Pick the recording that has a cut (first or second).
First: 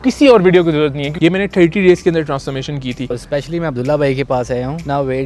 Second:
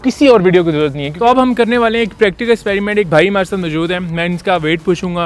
first